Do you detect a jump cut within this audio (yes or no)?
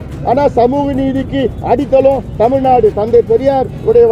no